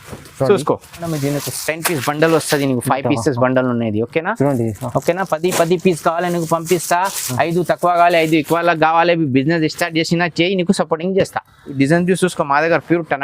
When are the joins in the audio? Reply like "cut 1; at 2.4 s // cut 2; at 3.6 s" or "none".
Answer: cut 1; at 1.1 s // cut 2; at 11.7 s